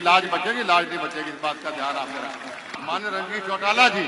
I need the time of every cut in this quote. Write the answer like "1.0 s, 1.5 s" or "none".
2.7 s